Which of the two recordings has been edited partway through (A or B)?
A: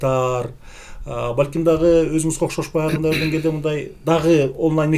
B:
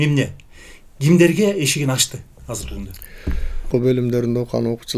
B